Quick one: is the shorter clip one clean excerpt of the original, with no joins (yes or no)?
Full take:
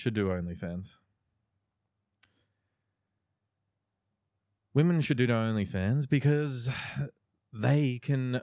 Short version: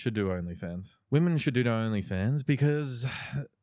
no